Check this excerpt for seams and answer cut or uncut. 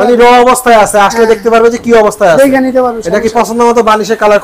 uncut